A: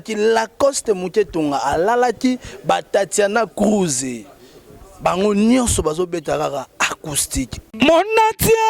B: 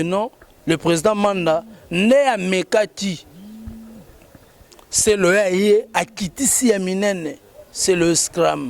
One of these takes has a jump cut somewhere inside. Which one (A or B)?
A